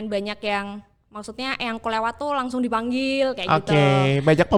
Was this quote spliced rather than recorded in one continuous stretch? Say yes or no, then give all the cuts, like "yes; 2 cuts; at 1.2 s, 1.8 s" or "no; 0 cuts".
no; 0 cuts